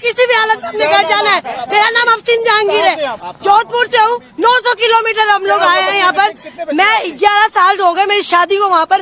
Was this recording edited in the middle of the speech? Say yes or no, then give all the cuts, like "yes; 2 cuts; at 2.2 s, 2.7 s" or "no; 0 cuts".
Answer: no; 0 cuts